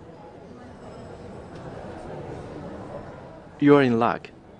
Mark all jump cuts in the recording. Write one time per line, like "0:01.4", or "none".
0:01.5